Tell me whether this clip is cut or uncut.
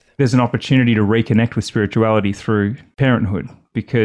cut